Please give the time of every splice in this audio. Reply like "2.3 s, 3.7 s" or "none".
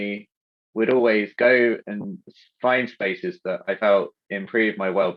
none